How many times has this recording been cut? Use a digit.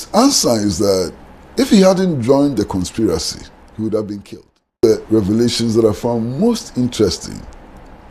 1